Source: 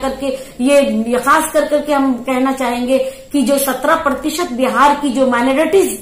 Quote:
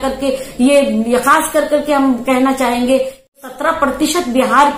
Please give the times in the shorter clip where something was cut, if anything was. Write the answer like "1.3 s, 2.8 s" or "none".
3.3 s